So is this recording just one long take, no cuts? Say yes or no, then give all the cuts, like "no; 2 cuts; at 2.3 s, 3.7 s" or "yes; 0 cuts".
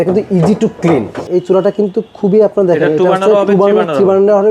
no; 1 cut; at 1.3 s